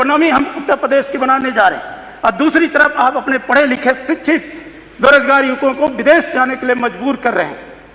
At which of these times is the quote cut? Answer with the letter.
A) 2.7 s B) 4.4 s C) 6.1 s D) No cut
D